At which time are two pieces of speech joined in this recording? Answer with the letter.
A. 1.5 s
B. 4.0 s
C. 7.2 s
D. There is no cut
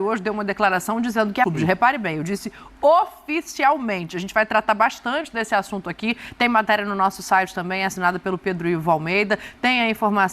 A